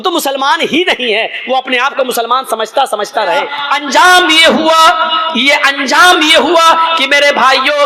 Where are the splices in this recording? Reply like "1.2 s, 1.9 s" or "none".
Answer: 3.7 s